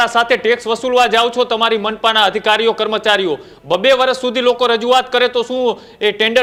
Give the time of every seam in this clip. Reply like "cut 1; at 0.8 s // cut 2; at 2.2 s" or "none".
none